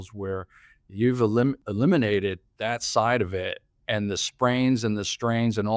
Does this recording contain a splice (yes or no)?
yes